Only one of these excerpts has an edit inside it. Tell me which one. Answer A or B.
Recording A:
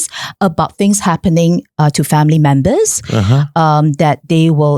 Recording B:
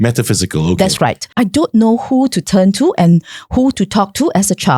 B